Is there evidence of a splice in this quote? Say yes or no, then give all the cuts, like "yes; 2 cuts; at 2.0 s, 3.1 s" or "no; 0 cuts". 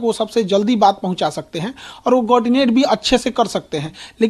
no; 0 cuts